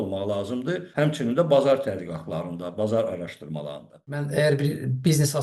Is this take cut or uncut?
cut